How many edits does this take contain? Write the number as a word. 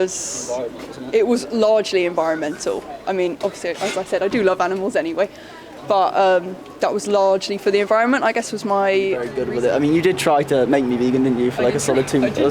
one